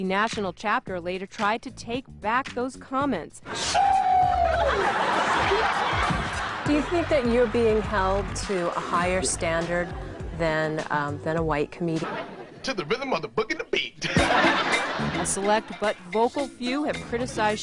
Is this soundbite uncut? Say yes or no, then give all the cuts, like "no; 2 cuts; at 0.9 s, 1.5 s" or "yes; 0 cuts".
yes; 0 cuts